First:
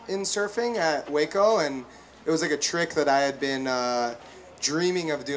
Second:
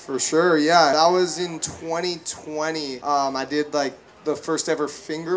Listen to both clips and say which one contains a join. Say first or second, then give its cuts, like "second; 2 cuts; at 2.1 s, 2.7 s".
second; 2 cuts; at 0.9 s, 3.0 s